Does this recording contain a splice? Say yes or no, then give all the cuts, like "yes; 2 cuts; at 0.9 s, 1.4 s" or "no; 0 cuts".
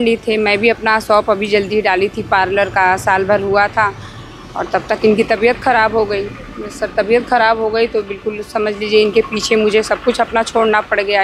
no; 0 cuts